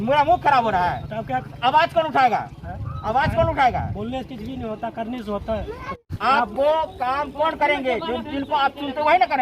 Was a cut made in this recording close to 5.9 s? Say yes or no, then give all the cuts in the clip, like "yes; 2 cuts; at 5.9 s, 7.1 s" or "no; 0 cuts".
yes; 1 cut; at 5.9 s